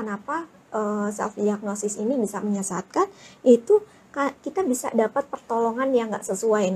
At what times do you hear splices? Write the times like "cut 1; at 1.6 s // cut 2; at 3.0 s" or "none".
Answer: none